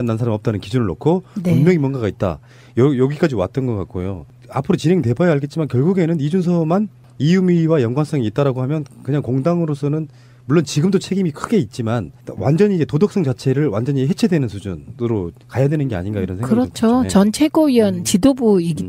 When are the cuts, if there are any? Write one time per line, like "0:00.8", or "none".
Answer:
0:13.4